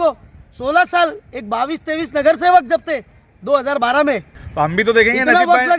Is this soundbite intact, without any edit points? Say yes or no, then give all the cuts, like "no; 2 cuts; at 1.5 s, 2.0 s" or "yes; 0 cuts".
no; 1 cut; at 4.4 s